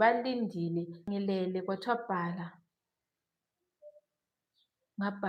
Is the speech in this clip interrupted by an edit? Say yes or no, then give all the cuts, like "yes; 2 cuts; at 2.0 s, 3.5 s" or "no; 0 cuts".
yes; 1 cut; at 1.0 s